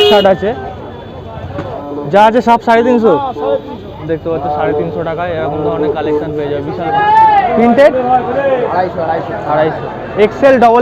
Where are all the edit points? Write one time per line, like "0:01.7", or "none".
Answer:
0:01.6
0:07.0